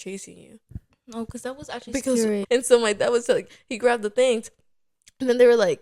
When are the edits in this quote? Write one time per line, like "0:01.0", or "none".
0:02.4